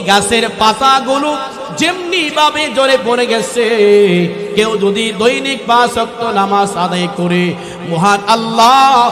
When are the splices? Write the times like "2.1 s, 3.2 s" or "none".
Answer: none